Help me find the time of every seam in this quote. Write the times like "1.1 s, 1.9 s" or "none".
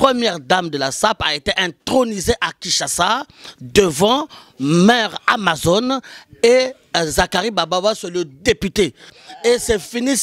9.2 s